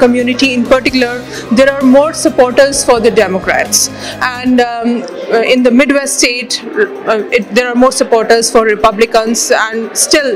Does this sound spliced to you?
no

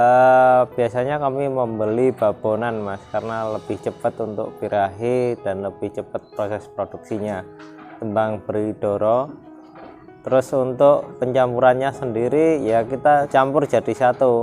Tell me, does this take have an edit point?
yes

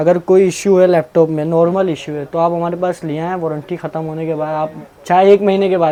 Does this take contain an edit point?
no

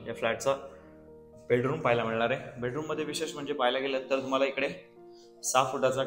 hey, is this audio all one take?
yes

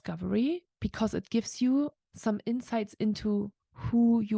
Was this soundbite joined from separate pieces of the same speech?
yes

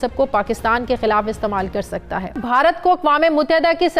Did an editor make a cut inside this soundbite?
yes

